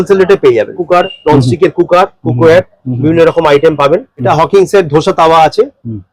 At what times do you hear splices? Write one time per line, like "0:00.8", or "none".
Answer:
0:00.8
0:04.1